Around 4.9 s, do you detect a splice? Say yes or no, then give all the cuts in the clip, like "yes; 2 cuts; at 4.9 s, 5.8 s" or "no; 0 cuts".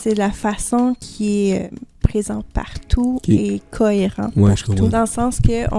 yes; 2 cuts; at 1.7 s, 4.9 s